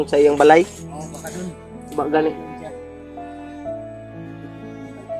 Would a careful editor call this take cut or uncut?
cut